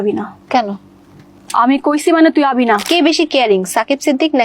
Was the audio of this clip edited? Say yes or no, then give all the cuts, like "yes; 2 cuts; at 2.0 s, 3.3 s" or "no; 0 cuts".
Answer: yes; 1 cut; at 2.8 s